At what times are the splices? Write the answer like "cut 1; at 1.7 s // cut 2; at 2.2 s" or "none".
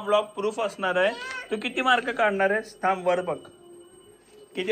none